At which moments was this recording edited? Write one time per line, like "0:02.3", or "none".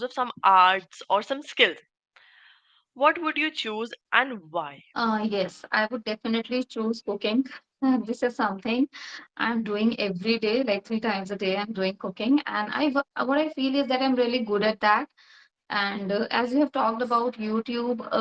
0:04.8